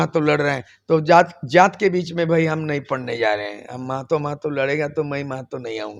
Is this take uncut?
yes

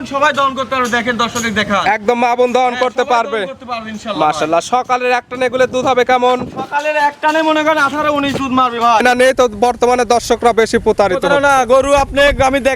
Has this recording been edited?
yes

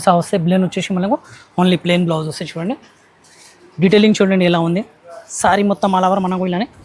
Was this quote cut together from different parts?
no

